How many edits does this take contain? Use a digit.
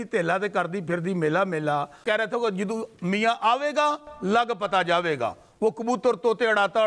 1